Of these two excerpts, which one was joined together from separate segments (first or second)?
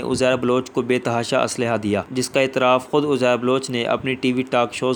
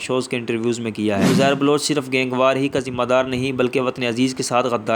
second